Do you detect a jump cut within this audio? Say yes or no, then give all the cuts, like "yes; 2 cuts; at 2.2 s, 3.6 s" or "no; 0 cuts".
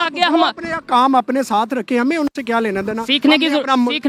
no; 0 cuts